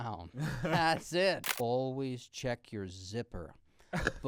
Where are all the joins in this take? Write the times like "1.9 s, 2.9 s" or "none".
1.4 s